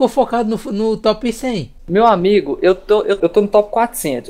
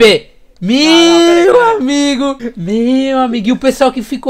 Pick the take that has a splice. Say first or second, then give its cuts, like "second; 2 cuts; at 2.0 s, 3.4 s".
first; 1 cut; at 3.2 s